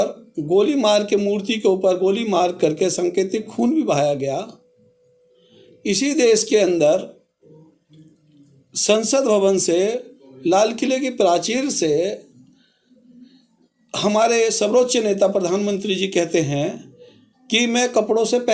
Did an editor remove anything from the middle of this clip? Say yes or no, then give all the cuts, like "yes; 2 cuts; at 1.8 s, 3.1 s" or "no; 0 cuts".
no; 0 cuts